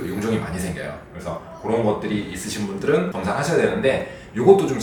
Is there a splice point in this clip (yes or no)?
no